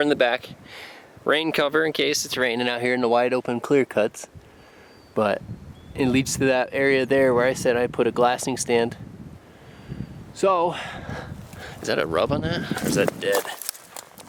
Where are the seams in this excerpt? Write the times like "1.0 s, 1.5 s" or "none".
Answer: none